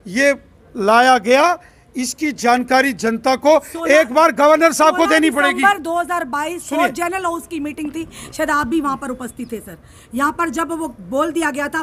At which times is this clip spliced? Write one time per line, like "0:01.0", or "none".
none